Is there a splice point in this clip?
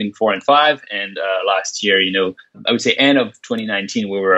yes; 1 cut; at 2.6 s

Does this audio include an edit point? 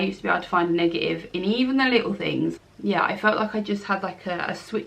yes; 1 cut; at 2.6 s

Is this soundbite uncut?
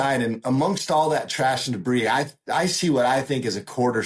yes; 0 cuts

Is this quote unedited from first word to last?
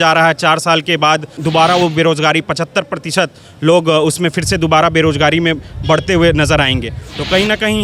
no; 1 cut; at 1.4 s

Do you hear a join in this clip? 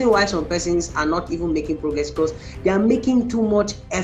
no; 0 cuts

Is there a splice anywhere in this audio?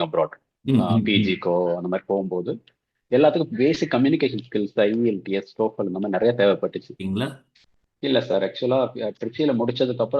yes; 1 cut; at 6.9 s

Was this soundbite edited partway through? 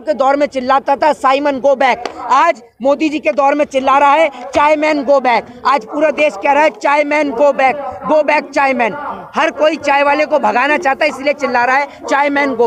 no; 0 cuts

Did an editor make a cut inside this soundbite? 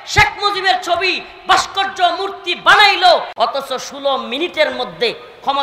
yes; 1 cut; at 3.3 s

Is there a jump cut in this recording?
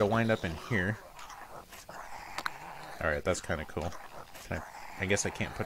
no; 0 cuts

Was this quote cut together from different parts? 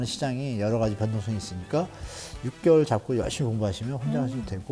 no; 0 cuts

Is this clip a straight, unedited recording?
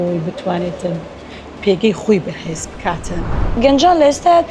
no; 1 cut; at 3.4 s

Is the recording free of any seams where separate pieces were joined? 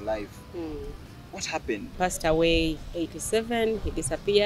no; 1 cut; at 1.9 s

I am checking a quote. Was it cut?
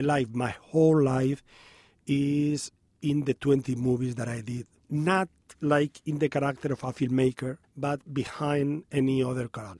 yes; 3 cuts; at 4.8 s, 5.4 s, 7.6 s

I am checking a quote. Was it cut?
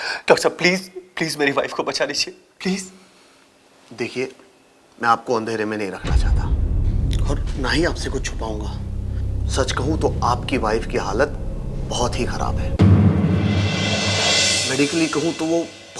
no; 0 cuts

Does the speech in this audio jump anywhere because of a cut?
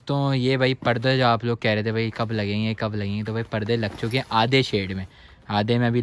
no; 0 cuts

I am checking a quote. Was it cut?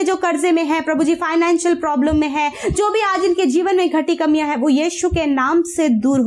no; 0 cuts

